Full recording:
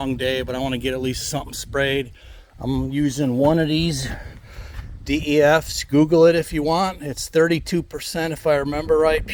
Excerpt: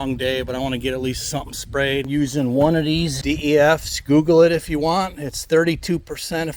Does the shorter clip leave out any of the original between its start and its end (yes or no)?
yes